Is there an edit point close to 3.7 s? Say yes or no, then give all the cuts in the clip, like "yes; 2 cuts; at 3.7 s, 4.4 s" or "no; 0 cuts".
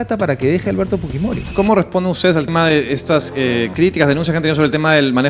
yes; 2 cuts; at 1.4 s, 3.7 s